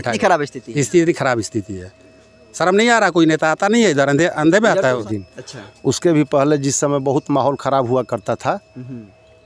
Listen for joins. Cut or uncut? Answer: cut